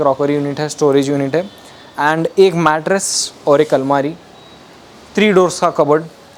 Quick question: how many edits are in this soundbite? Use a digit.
0